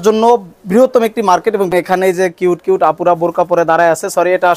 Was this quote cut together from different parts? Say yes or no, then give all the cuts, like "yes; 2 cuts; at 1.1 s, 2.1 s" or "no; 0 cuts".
yes; 1 cut; at 1.7 s